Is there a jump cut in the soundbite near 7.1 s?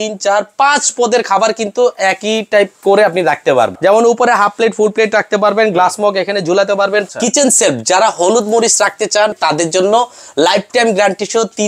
yes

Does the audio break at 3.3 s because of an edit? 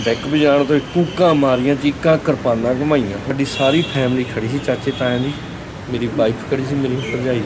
yes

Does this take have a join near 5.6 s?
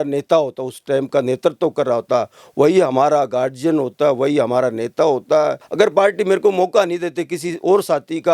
yes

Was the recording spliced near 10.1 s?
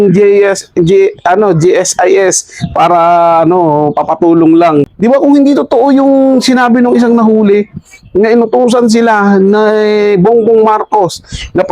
no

